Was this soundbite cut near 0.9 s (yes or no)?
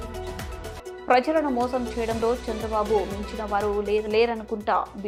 no